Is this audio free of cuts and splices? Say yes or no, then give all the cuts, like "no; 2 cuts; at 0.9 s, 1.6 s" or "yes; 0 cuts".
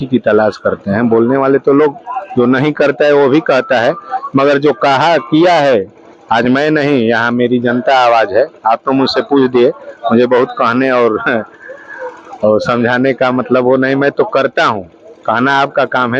yes; 0 cuts